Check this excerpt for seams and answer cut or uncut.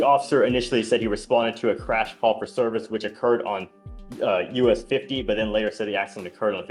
uncut